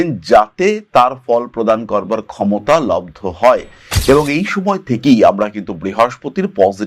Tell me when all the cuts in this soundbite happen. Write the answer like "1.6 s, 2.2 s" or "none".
none